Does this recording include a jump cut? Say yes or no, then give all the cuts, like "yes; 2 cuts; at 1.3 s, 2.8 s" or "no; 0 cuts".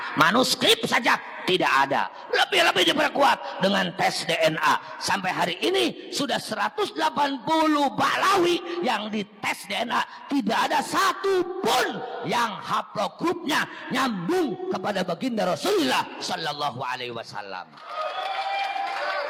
no; 0 cuts